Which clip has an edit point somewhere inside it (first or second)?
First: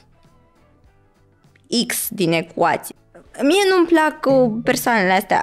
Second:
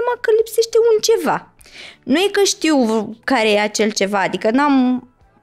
first